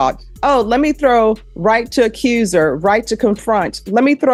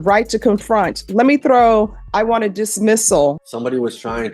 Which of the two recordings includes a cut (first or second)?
second